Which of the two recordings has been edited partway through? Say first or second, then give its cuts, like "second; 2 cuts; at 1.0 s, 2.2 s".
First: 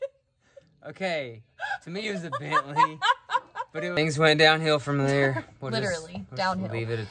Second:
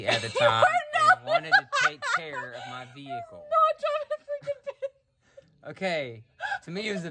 first; 1 cut; at 4.0 s